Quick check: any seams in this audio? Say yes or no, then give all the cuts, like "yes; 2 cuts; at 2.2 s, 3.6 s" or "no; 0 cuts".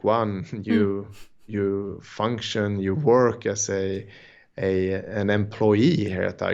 no; 0 cuts